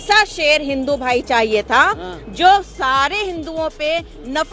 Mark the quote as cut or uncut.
uncut